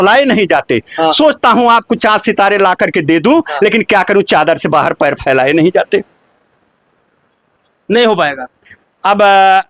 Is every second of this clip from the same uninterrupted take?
yes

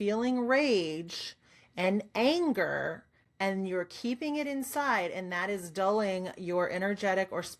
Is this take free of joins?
yes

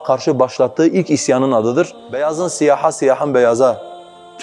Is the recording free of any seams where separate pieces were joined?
no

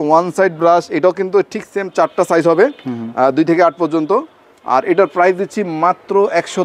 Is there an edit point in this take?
no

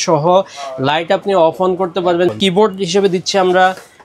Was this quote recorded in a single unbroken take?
no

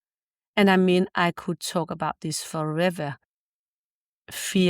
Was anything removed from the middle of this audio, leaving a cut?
yes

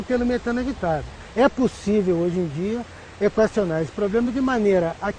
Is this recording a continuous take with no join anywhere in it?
no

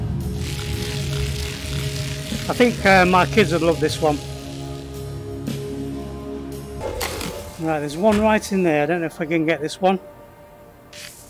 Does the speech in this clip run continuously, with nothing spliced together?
no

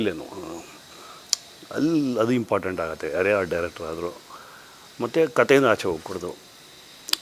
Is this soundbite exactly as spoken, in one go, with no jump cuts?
yes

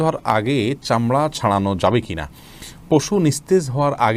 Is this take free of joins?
yes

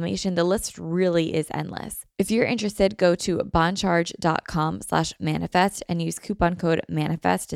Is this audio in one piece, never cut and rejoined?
no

